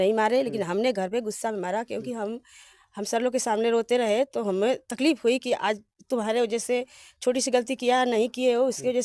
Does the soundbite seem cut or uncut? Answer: uncut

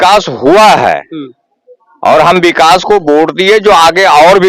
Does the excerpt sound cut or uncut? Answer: uncut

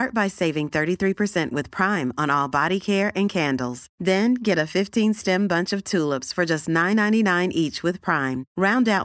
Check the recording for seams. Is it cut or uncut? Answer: uncut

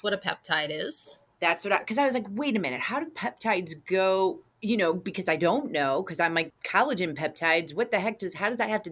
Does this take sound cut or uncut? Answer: cut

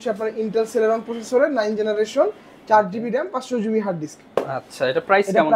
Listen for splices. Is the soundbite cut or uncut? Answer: uncut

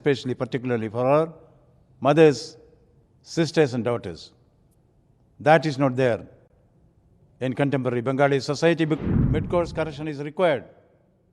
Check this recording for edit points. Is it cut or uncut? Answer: cut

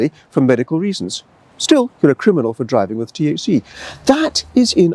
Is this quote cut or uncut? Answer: uncut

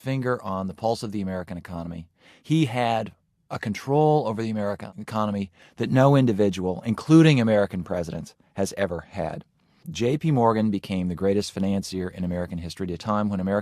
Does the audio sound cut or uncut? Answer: cut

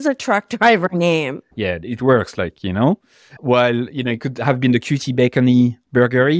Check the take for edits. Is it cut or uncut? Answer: cut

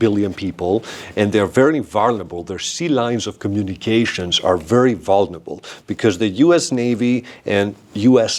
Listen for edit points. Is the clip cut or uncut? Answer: uncut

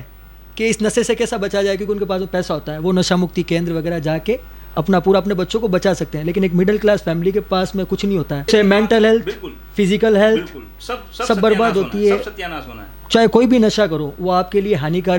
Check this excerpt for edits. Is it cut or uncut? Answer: cut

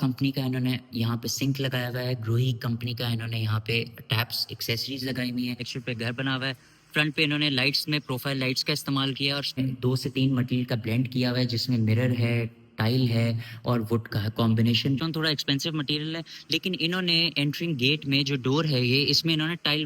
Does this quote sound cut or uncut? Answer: cut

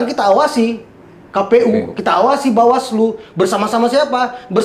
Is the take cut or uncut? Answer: uncut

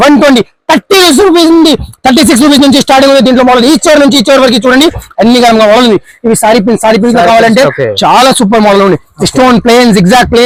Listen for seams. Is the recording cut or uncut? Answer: uncut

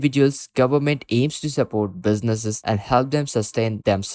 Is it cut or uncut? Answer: uncut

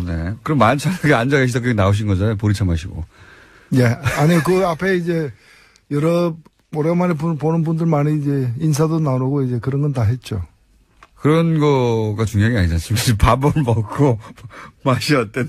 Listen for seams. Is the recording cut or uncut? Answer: uncut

